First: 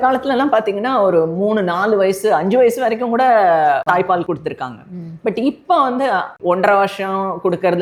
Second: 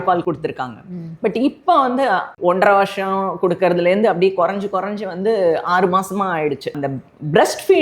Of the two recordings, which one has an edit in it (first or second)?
second